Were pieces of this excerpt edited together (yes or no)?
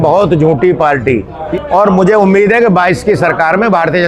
yes